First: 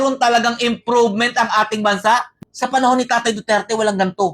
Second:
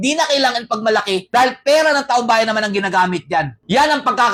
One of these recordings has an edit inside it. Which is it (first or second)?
first